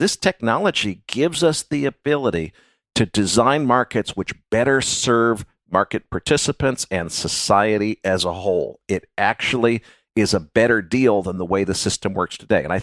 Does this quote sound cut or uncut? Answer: uncut